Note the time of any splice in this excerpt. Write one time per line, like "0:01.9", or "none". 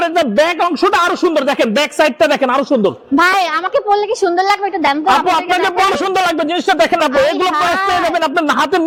none